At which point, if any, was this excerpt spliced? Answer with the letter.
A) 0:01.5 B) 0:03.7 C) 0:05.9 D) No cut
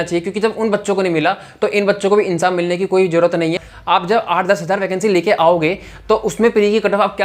B